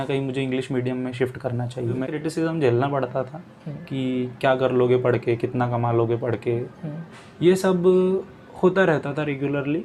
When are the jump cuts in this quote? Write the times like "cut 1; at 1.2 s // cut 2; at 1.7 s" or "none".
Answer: cut 1; at 2.1 s